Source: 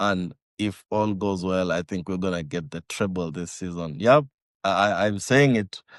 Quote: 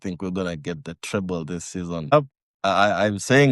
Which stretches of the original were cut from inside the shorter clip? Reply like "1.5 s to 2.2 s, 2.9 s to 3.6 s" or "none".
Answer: 4.0 s to 4.1 s